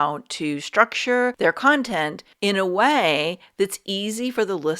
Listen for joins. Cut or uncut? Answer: cut